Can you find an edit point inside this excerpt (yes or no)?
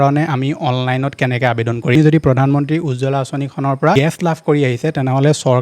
yes